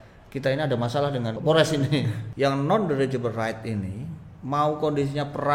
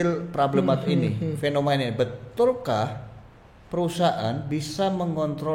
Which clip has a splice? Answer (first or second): first